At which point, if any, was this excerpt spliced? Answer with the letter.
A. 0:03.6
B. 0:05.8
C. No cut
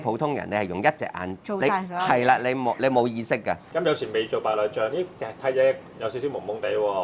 A